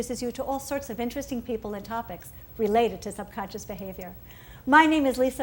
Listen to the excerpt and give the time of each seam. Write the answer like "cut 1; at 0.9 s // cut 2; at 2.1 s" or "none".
none